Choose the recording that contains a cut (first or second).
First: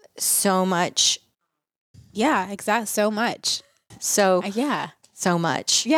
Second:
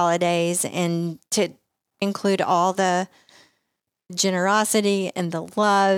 second